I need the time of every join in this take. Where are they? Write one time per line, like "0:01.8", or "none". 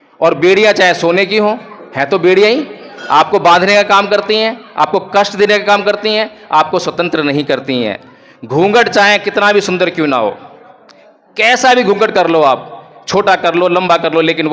none